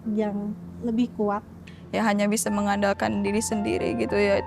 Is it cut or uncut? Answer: cut